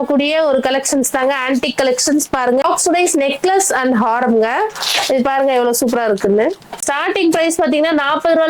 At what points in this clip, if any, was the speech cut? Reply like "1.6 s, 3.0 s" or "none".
2.6 s, 6.8 s